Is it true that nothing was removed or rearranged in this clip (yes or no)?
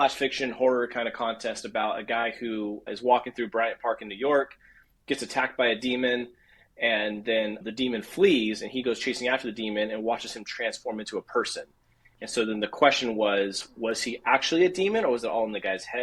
yes